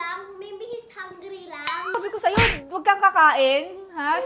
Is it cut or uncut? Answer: cut